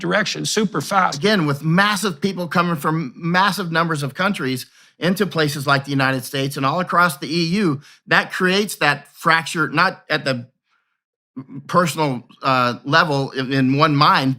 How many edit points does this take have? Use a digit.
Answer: 1